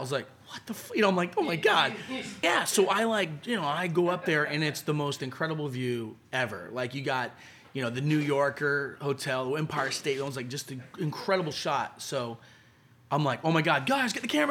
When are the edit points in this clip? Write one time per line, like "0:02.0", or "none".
0:02.4